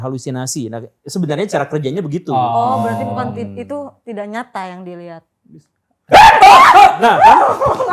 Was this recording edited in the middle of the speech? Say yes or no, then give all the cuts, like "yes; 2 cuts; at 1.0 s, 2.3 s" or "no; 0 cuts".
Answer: no; 0 cuts